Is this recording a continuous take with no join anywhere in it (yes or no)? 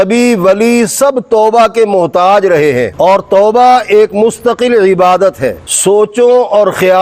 no